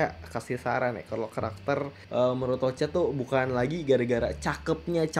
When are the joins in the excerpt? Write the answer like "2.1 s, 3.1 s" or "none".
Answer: 2.0 s